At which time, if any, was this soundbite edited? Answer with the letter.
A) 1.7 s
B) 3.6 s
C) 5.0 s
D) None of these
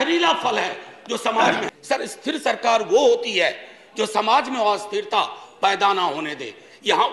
A